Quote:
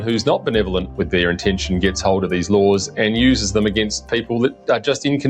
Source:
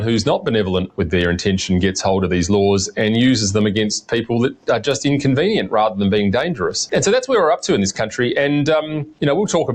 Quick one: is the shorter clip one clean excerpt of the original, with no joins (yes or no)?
yes